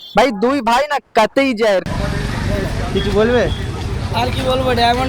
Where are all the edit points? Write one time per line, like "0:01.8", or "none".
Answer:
0:01.8